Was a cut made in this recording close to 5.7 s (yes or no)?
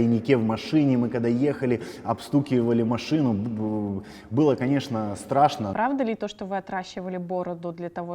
yes